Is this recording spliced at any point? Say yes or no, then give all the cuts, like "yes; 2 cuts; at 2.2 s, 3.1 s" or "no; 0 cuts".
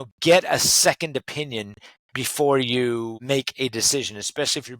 yes; 1 cut; at 3.2 s